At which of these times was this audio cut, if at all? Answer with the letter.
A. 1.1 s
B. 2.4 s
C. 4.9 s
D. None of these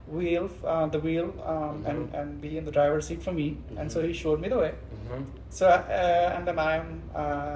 D